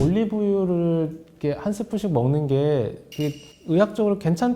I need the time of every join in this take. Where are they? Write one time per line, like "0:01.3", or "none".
none